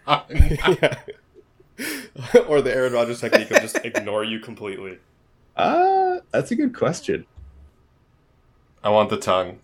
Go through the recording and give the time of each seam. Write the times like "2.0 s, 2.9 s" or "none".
8.1 s